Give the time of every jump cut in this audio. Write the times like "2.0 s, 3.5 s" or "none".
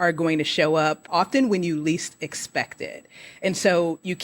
1.0 s